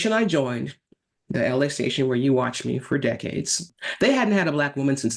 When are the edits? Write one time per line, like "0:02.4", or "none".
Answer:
0:03.7